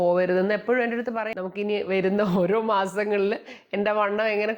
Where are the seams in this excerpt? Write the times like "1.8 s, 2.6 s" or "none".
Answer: 1.3 s